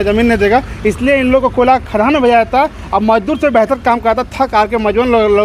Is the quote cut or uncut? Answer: uncut